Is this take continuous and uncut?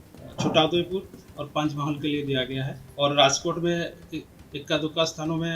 no; 1 cut; at 2.8 s

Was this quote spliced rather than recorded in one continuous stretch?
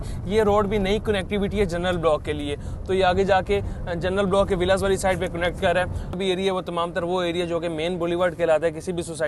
yes; 1 cut; at 6.2 s

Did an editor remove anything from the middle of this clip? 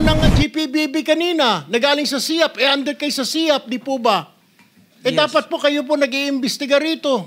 no; 0 cuts

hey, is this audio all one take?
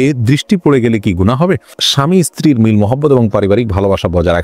no; 1 cut; at 1.8 s

